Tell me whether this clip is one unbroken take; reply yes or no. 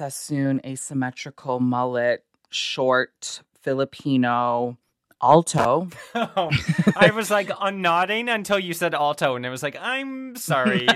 yes